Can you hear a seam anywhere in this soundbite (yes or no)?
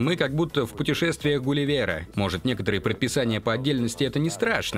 yes